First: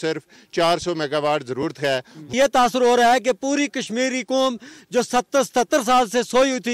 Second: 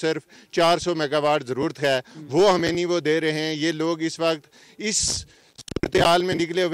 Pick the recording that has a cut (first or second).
first